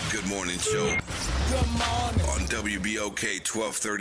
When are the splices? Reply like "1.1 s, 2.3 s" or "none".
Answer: none

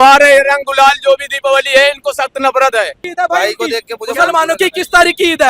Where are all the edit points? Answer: 3.0 s

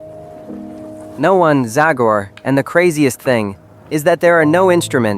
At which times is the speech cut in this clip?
1.1 s

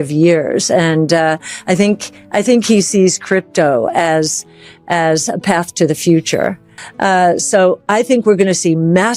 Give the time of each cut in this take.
6.7 s

